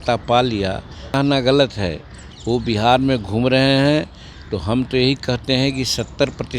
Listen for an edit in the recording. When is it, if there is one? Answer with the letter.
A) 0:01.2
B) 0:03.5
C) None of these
A